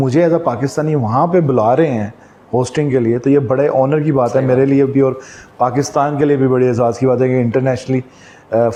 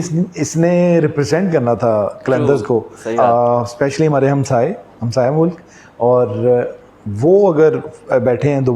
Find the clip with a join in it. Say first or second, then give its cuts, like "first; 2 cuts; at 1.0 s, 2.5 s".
second; 1 cut; at 3.0 s